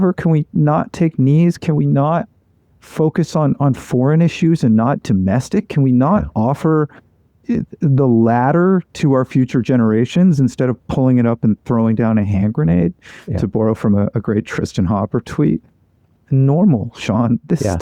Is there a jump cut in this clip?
no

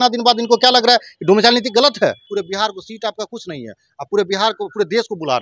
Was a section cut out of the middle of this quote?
yes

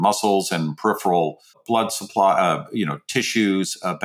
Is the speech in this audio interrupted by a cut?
yes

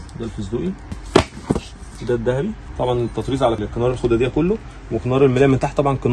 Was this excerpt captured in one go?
no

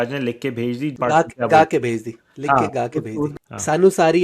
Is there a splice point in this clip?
yes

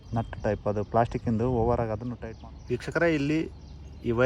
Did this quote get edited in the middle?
yes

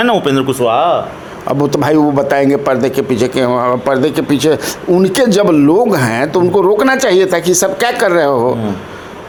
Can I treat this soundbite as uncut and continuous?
yes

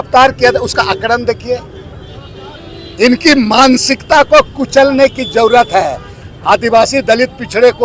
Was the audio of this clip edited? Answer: no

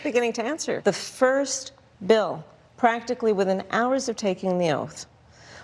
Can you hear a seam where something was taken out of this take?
yes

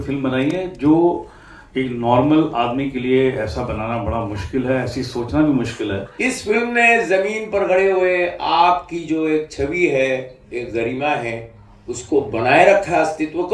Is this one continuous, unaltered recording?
no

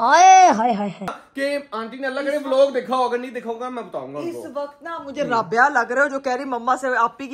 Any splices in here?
no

